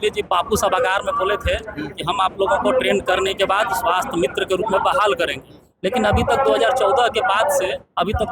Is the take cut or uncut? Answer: uncut